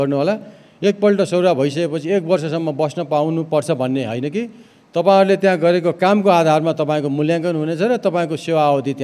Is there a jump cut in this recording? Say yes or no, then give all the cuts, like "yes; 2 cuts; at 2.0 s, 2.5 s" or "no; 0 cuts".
no; 0 cuts